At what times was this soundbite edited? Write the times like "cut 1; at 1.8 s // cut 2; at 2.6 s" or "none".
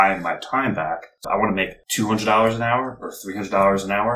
cut 1; at 1.2 s